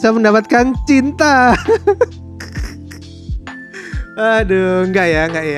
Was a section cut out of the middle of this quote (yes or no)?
no